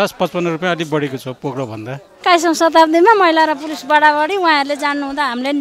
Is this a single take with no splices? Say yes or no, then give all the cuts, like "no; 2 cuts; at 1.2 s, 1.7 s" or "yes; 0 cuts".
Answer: no; 1 cut; at 2.1 s